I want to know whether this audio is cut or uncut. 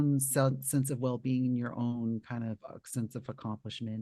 uncut